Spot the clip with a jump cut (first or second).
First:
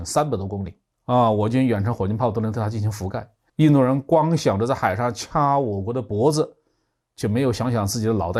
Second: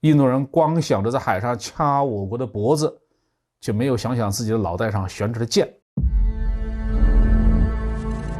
second